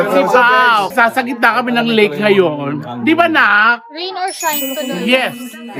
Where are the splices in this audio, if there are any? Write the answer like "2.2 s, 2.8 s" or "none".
0.9 s